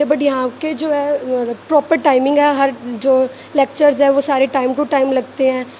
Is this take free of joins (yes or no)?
yes